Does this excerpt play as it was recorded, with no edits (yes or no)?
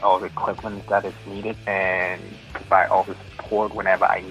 no